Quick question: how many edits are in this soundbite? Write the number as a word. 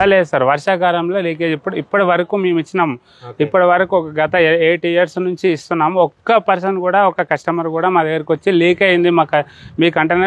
zero